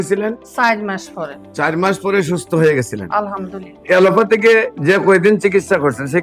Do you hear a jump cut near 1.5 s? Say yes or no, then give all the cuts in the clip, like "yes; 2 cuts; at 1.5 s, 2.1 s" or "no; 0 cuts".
no; 1 cut; at 3.8 s